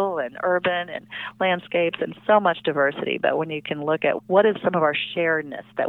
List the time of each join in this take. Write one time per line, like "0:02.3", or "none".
0:04.5